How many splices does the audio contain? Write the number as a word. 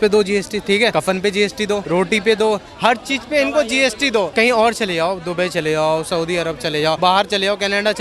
four